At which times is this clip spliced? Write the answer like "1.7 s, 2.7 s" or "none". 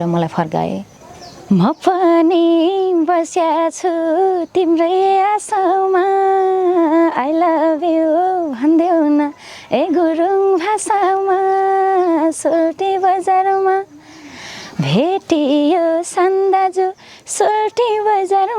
0.9 s